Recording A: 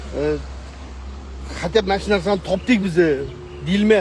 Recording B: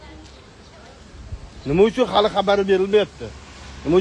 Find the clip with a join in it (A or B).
B